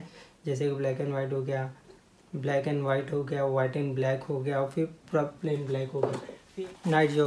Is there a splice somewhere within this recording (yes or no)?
yes